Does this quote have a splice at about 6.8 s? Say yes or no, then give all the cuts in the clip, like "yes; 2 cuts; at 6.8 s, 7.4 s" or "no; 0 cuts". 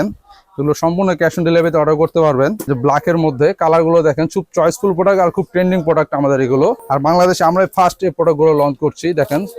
yes; 2 cuts; at 2.7 s, 6.8 s